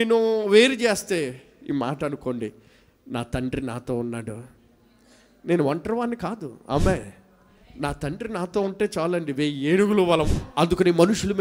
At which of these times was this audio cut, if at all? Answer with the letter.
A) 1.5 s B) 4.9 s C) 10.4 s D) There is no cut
C